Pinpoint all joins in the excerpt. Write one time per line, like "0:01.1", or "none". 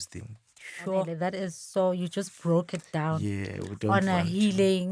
0:01.1